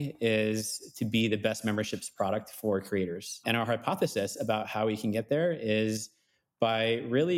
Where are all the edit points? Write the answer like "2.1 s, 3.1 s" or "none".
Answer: none